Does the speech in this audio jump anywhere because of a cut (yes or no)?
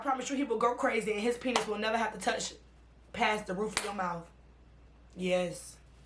no